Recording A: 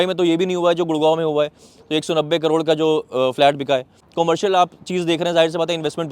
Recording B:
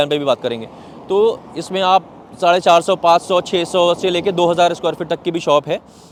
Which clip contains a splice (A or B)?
A